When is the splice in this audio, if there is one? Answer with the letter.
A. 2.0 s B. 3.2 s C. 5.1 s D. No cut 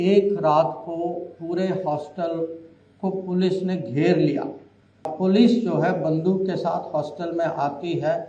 C